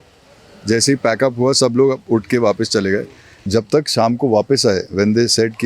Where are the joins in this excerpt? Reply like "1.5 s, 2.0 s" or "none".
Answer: 3.4 s